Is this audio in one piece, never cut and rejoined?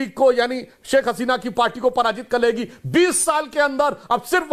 yes; 0 cuts

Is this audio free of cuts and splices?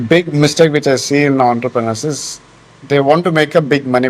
yes; 0 cuts

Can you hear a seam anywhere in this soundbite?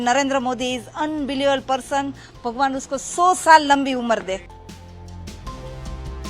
yes; 1 cut; at 4.4 s

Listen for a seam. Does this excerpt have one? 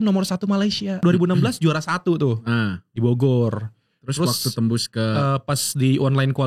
yes; 1 cut; at 1.0 s

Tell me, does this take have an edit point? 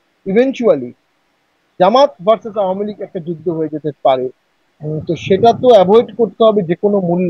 no; 0 cuts

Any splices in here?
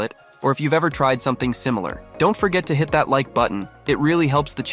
yes; 2 cuts; at 2.0 s, 3.7 s

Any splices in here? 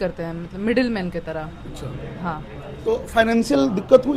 no; 0 cuts

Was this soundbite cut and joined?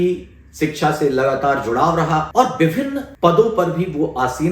yes; 2 cuts; at 2.3 s, 3.0 s

